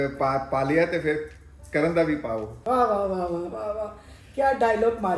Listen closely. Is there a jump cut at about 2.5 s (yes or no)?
yes